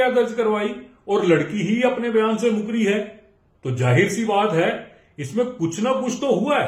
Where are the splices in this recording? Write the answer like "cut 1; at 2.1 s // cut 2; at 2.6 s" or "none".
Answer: none